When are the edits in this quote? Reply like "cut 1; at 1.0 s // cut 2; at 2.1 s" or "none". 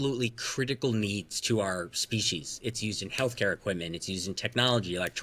none